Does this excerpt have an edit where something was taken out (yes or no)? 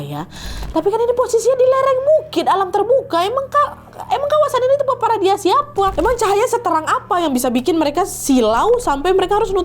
yes